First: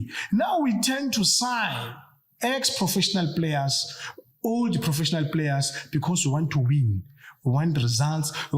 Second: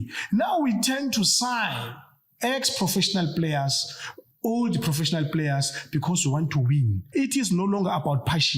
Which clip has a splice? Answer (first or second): second